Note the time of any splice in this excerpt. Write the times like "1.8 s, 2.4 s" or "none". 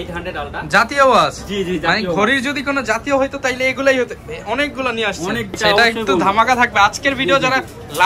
5.5 s